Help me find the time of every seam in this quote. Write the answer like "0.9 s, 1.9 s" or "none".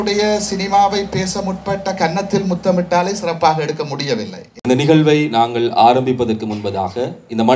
4.6 s